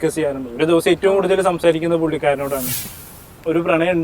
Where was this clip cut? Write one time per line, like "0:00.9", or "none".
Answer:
0:02.9

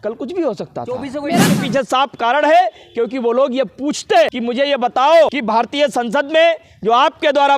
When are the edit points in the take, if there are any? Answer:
0:01.5
0:04.4
0:05.4

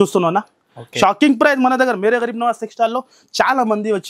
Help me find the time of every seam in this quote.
none

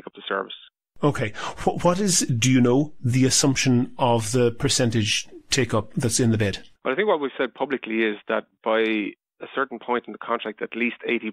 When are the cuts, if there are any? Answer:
0:06.7

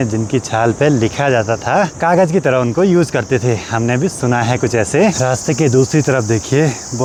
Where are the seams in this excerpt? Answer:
none

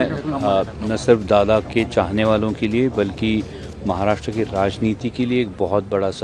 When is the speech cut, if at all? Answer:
none

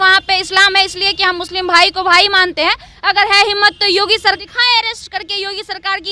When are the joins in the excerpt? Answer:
0:04.4

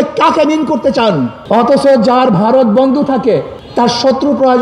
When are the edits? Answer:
0:01.4

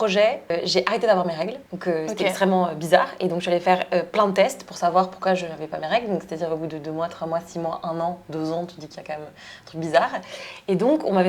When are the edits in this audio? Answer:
0:01.7

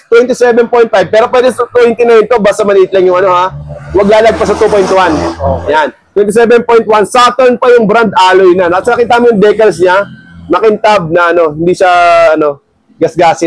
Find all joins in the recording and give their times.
none

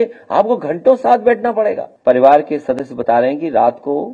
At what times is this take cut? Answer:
0:01.9

